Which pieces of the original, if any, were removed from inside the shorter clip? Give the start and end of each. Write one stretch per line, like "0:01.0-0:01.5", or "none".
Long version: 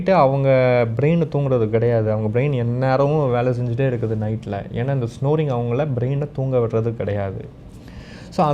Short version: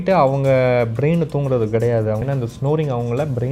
0:02.2-0:04.8

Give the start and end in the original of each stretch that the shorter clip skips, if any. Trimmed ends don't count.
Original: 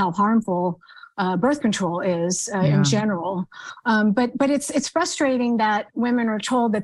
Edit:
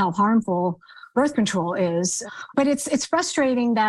0:01.1-0:01.4
0:02.7-0:04.3

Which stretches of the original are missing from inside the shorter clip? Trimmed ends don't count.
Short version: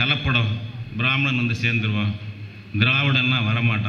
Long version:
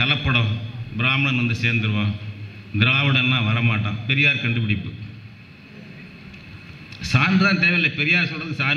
none

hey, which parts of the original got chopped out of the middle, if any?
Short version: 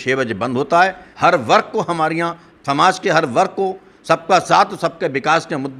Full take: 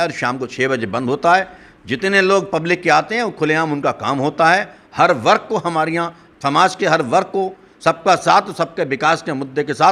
0:01.6-0:04.8

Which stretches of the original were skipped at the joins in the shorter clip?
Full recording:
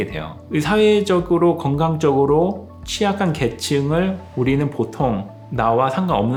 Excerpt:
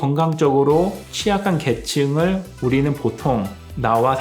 0:02.7-0:02.8

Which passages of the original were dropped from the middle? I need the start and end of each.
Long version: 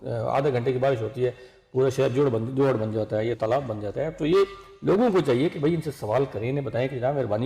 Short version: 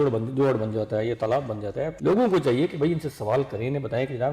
0:04.1-0:04.7

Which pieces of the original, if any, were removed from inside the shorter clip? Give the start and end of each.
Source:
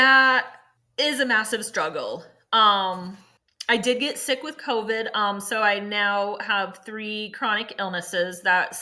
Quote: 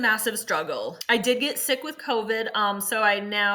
0:02.2-0:03.5

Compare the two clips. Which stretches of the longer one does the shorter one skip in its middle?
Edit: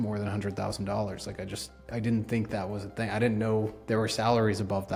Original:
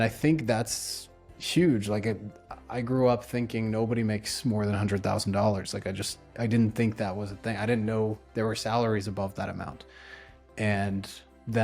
none

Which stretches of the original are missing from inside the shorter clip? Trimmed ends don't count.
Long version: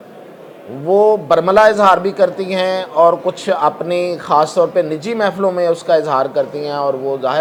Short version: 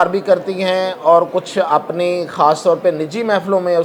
none

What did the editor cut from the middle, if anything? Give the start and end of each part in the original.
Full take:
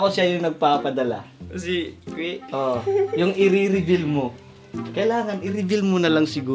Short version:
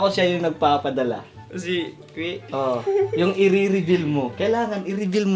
0:04.3-0:04.9

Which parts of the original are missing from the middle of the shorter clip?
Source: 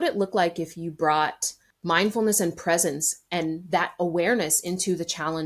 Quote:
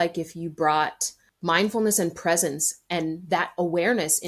none

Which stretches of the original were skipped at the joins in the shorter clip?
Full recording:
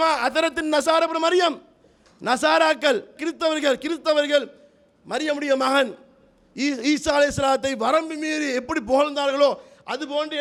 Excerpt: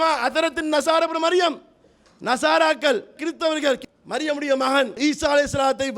0:03.8-0:04.8
0:06.0-0:06.8

